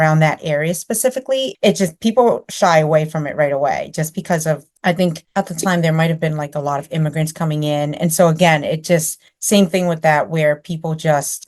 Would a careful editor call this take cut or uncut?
uncut